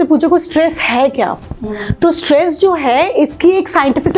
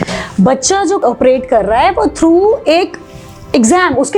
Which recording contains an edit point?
second; 1 cut; at 1.0 s

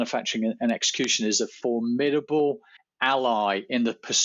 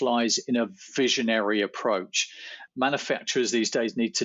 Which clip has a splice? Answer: second; 1 cut; at 2.6 s

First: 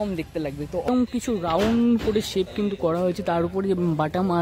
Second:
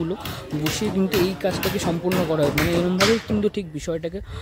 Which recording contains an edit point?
first; 1 cut; at 0.9 s

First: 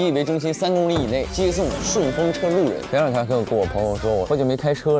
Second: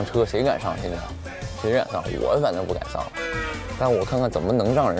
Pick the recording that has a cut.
first; 3 cuts; at 1.3 s, 2.8 s, 4.3 s

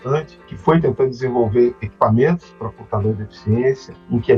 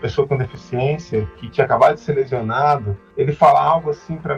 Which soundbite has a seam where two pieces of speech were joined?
second; 1 cut; at 3.0 s

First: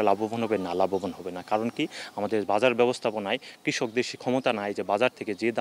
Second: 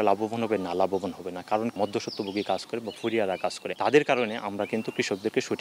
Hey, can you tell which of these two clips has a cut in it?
second; 2 cuts; at 1.7 s, 3.7 s

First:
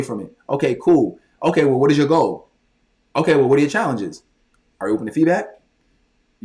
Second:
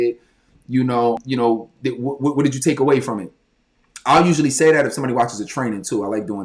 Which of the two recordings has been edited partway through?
second; 1 cut; at 1.2 s

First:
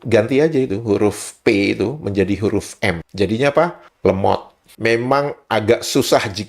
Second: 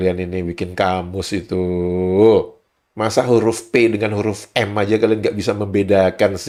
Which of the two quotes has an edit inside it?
first; 1 cut; at 4.7 s

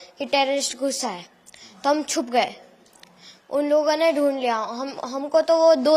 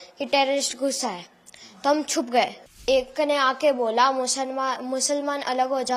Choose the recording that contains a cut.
second; 1 cut; at 2.8 s

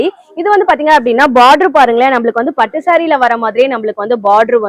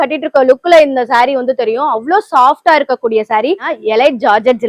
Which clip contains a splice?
second; 1 cut; at 3.7 s

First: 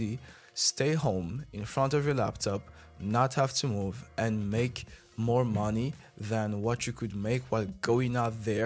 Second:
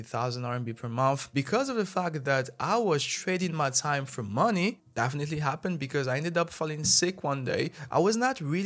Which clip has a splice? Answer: second; 3 cuts; at 1.2 s, 4.8 s, 7.8 s

